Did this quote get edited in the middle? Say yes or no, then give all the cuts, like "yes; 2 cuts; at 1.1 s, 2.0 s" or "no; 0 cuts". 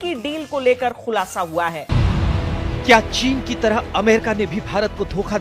yes; 1 cut; at 1.9 s